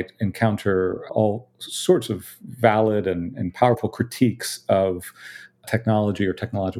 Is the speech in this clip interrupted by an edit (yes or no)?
yes